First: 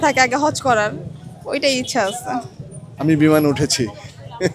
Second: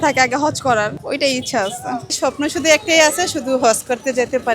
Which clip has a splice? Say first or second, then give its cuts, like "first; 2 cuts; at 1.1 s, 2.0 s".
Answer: second; 2 cuts; at 1.0 s, 2.1 s